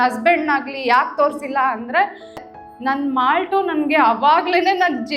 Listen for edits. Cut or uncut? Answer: cut